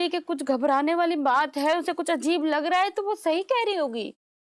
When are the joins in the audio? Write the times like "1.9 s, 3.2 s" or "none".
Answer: none